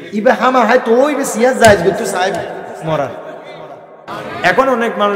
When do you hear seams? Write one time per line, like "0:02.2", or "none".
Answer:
0:03.9